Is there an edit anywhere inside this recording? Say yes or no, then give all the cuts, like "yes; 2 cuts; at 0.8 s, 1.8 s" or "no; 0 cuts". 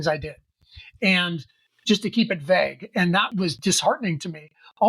yes; 1 cut; at 3.5 s